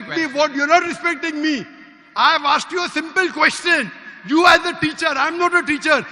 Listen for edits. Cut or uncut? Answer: uncut